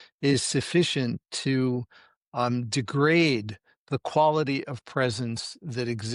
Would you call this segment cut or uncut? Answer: uncut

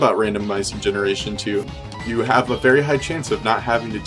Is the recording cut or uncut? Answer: cut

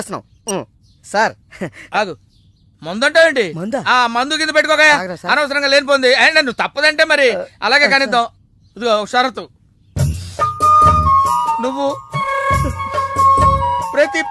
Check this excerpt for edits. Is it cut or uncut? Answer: uncut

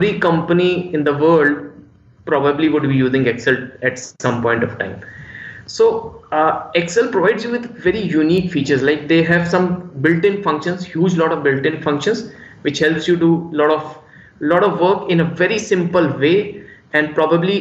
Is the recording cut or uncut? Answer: uncut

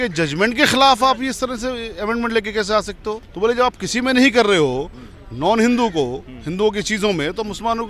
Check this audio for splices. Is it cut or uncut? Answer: cut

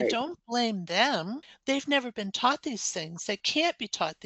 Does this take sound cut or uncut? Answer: cut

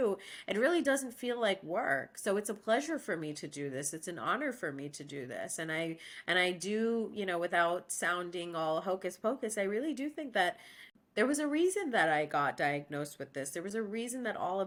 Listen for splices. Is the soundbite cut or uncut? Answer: uncut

